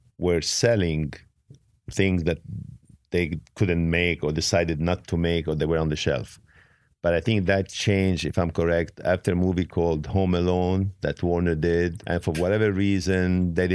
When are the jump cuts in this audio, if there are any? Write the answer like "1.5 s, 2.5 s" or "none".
12.0 s